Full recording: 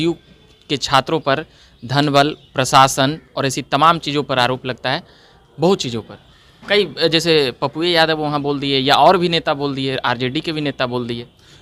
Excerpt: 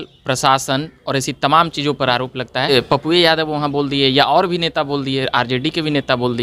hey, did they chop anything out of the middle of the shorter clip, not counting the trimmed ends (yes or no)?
yes